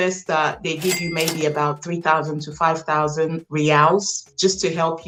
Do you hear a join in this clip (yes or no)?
no